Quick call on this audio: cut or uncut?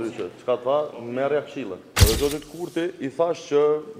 cut